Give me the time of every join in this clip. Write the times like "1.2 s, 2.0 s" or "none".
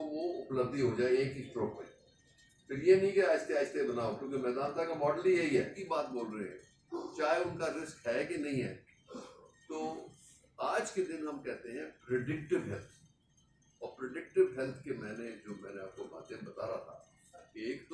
5.8 s

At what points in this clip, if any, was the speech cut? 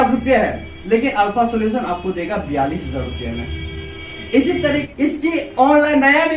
4.8 s

